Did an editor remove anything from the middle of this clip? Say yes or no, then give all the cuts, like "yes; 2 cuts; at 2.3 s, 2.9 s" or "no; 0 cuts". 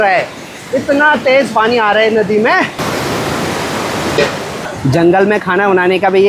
no; 0 cuts